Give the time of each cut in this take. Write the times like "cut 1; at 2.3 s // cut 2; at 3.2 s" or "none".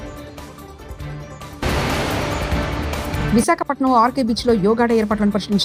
none